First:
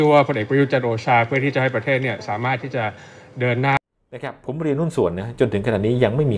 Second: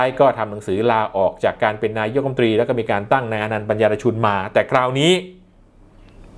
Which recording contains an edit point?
first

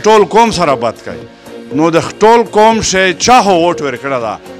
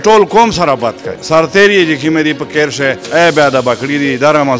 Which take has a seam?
second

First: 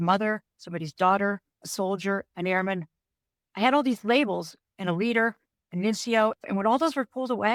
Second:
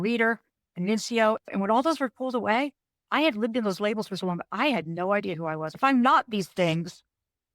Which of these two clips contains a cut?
second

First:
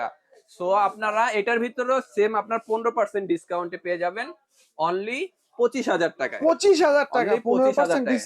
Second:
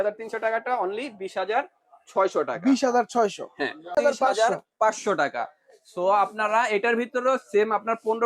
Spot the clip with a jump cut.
second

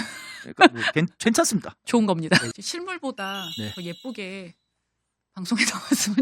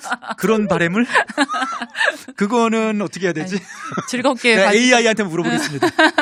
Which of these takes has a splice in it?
first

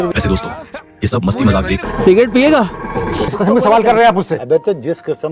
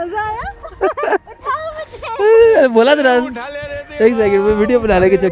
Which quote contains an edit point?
first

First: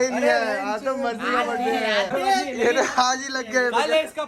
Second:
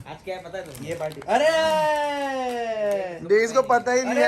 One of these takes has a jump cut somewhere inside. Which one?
first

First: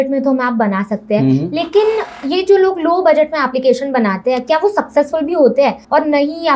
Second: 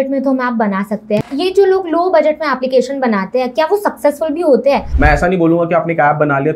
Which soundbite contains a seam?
second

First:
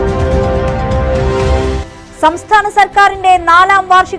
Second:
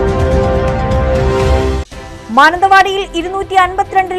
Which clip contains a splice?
second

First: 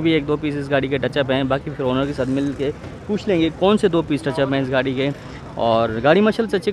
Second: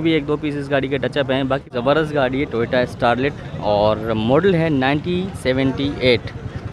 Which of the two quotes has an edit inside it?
second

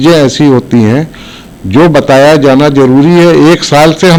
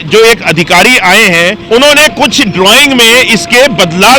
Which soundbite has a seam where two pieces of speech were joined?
second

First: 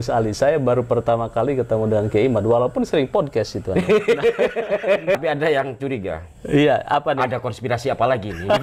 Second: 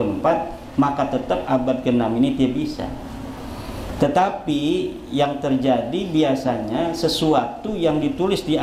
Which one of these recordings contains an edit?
first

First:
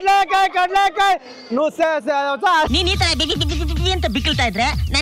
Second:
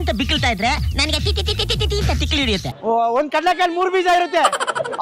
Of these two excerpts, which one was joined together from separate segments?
second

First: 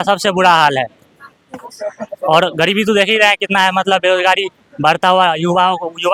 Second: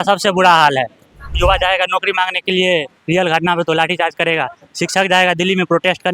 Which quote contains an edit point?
second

